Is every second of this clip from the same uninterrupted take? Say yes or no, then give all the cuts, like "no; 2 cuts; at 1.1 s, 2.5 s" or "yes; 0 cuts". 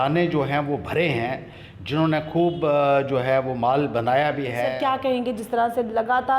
no; 1 cut; at 4.7 s